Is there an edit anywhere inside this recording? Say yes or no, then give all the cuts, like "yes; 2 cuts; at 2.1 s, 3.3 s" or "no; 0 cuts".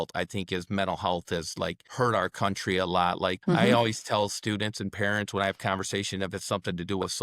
yes; 2 cuts; at 1.8 s, 3.4 s